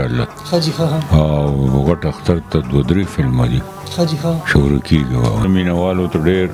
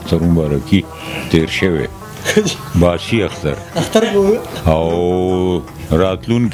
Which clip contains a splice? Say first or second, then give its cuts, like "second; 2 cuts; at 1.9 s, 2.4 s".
first; 1 cut; at 5.4 s